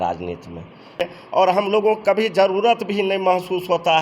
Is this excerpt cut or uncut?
cut